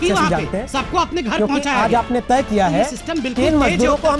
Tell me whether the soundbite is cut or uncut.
uncut